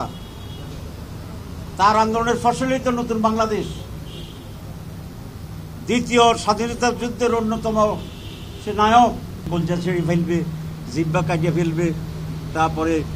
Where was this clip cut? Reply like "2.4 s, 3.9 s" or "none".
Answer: 9.5 s